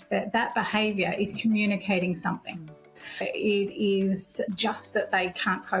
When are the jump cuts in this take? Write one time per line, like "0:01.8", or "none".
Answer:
0:03.3